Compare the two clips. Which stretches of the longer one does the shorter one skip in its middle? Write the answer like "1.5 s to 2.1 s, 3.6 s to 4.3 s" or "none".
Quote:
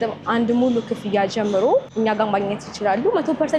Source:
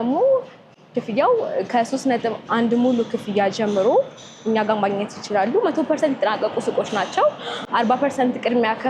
4.1 s to 4.4 s